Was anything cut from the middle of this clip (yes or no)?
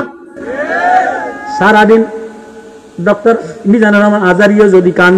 no